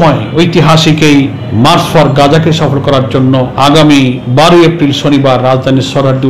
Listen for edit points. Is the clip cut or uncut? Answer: cut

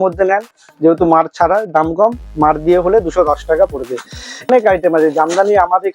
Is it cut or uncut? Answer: cut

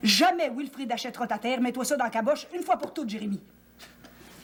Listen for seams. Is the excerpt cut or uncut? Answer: uncut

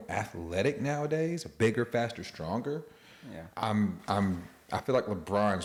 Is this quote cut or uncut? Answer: uncut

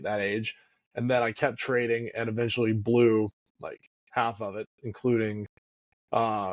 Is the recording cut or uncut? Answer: uncut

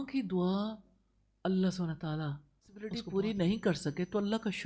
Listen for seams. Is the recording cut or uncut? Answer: cut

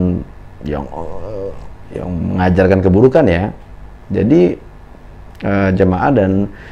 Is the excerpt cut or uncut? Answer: uncut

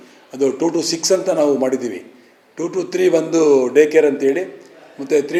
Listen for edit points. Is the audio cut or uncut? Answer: uncut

